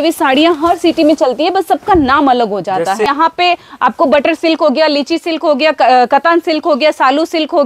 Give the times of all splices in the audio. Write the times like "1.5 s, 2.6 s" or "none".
3.1 s